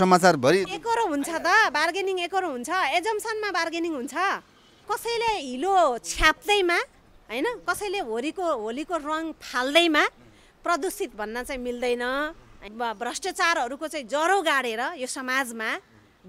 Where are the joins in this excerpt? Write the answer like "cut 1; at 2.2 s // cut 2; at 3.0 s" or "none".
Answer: cut 1; at 4.8 s // cut 2; at 12.5 s